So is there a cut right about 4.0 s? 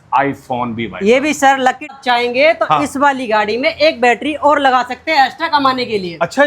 no; 1 cut; at 1.9 s

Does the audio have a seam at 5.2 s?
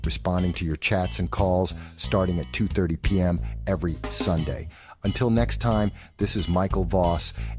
yes; 1 cut; at 5.2 s

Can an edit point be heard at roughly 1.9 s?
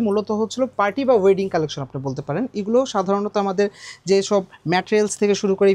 no; 0 cuts

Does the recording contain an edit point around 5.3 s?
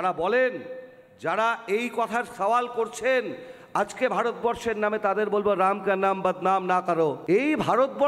no; 1 cut; at 7.2 s

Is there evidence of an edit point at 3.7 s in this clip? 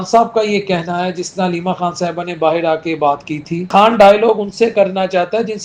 yes; 1 cut; at 3.7 s

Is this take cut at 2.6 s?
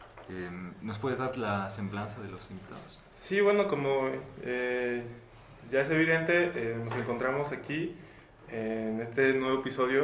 no; 1 cut; at 5.2 s

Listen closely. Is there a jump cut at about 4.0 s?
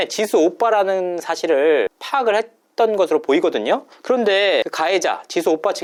no; 0 cuts

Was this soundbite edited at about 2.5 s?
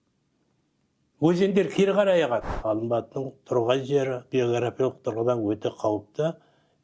yes; 1 cut; at 2.5 s

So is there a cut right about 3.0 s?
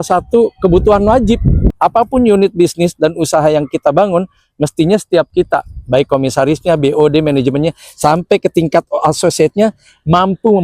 no; 1 cut; at 1.7 s

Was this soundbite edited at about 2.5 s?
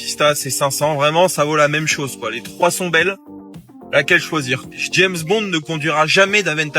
yes; 2 cuts; at 2.5 s, 4.8 s

